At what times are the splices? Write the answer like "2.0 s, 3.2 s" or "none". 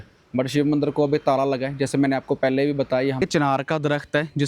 3.2 s